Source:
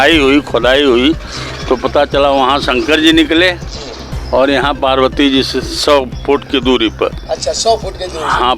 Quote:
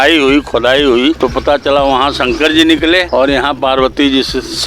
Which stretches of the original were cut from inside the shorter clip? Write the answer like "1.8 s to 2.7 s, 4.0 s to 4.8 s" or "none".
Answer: 1.2 s to 1.7 s, 3.5 s to 4.3 s